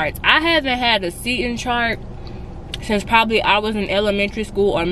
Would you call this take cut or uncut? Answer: uncut